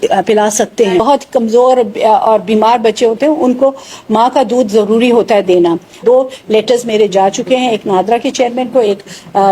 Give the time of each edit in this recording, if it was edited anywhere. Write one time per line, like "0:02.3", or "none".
0:01.0
0:06.0